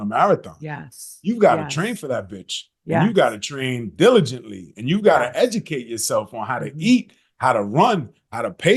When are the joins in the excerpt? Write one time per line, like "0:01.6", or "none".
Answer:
none